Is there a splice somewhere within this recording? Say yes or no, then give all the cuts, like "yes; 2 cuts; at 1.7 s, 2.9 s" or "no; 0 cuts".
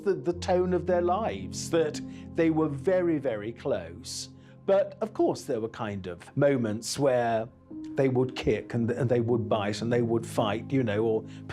no; 0 cuts